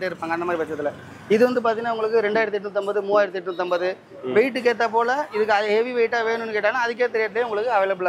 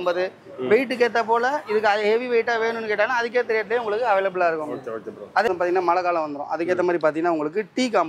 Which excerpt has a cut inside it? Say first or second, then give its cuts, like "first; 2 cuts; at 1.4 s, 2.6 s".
second; 1 cut; at 5.5 s